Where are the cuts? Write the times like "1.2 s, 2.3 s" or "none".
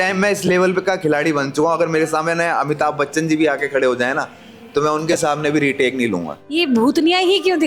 6.6 s